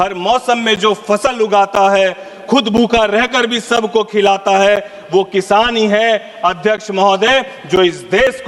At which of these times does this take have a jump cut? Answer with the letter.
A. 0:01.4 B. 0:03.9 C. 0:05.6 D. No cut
D